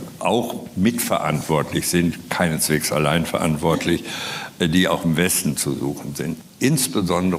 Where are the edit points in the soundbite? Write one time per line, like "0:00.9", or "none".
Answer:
0:06.5